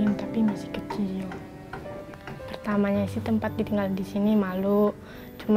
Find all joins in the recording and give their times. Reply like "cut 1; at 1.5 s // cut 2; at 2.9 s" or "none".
cut 1; at 2.1 s